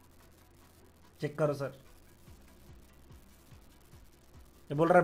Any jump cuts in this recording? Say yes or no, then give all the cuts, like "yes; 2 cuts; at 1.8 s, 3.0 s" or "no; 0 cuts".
no; 0 cuts